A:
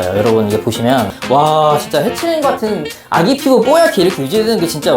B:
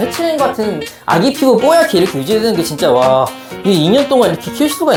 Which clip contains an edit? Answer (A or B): A